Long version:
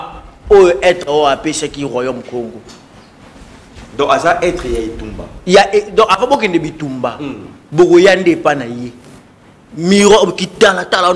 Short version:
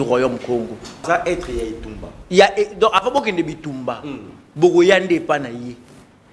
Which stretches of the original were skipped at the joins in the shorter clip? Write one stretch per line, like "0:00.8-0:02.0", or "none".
0:02.9-0:04.2